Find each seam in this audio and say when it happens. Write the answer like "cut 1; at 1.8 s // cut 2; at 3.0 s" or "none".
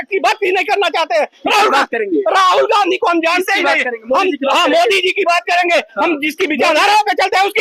none